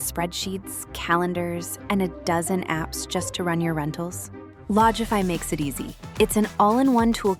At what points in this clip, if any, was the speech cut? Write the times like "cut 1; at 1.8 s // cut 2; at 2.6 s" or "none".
none